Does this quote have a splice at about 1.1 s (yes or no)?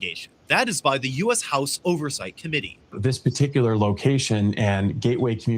no